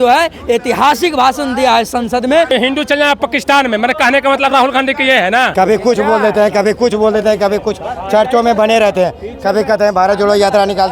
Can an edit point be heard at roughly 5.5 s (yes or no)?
yes